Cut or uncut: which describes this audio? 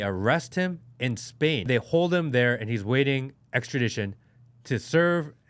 cut